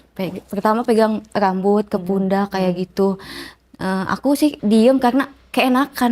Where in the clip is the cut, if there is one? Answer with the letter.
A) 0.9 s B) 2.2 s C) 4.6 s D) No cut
C